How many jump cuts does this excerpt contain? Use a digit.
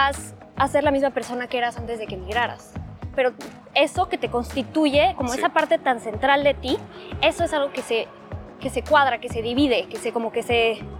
1